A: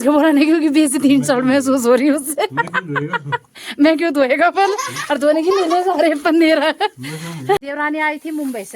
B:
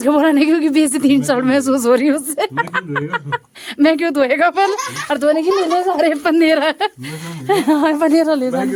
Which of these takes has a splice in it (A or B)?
A